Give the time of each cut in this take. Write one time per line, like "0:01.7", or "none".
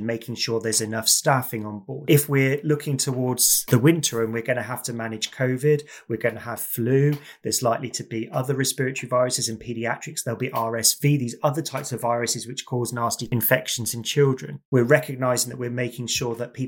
0:02.0
0:03.7
0:13.2
0:14.5